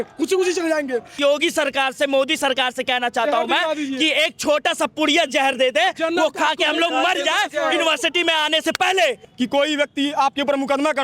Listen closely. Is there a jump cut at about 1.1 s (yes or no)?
yes